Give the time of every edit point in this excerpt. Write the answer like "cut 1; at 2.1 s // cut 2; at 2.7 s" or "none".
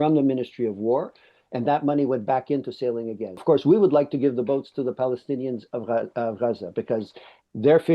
cut 1; at 3.3 s